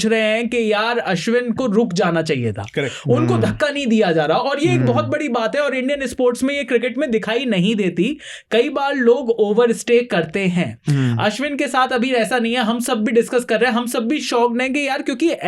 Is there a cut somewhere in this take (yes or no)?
no